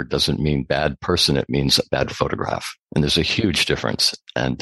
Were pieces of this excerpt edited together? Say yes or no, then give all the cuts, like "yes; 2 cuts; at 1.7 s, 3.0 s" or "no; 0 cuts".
no; 0 cuts